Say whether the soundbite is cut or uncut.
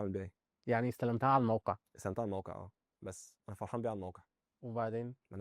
uncut